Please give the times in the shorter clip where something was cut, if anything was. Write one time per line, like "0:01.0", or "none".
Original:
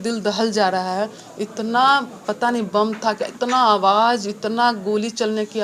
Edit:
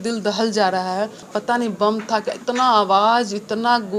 0:01.2